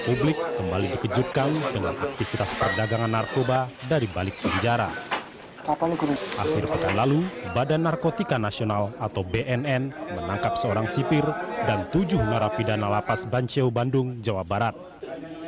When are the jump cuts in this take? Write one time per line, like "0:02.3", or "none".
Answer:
0:03.5